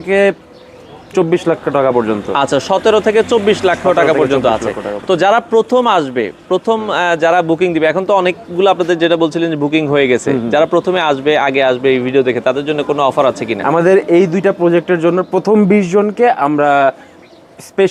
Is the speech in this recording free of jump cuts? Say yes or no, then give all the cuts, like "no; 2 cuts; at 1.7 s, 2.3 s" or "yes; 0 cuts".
yes; 0 cuts